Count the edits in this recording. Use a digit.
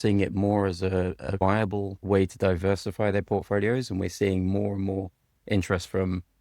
1